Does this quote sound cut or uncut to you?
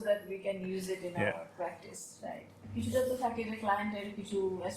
cut